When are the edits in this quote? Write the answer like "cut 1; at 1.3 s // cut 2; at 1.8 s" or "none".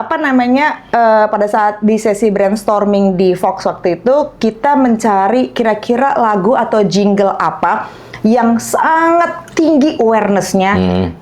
none